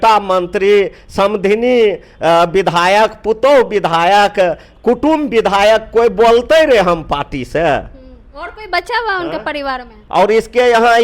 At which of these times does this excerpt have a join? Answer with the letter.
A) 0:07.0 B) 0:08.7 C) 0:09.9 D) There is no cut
C